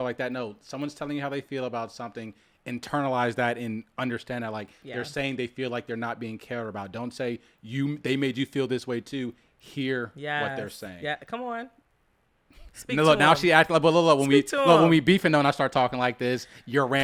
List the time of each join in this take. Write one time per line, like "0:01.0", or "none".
none

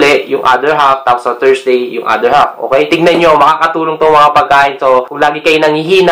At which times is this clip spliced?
0:02.9
0:05.1

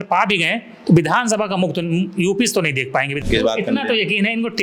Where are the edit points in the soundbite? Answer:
0:03.2

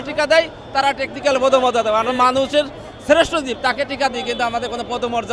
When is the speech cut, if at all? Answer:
none

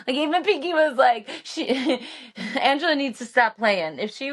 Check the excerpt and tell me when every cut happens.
none

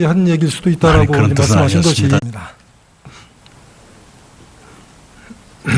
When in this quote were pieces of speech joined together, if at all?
none

